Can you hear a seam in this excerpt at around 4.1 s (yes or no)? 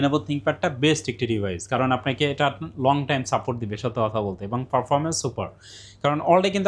no